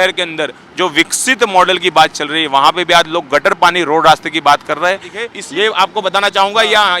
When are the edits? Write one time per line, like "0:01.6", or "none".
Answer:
0:05.3